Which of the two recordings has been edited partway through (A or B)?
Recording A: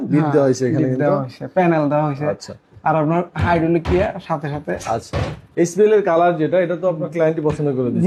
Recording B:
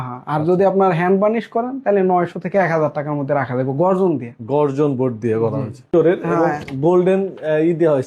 B